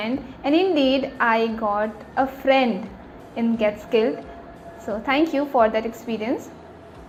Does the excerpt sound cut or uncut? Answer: uncut